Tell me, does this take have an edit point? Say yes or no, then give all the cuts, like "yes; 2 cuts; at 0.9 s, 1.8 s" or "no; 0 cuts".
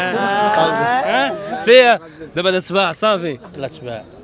no; 0 cuts